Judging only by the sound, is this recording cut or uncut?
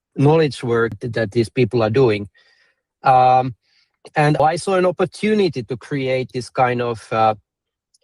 cut